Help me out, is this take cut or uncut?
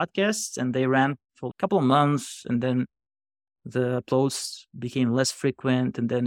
uncut